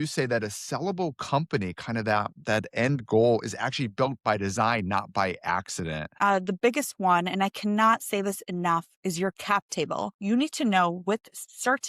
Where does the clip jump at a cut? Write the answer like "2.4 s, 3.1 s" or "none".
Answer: 6.1 s, 10.1 s